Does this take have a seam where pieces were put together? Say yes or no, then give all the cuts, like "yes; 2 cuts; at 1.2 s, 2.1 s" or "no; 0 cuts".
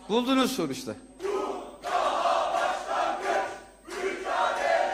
yes; 1 cut; at 1.1 s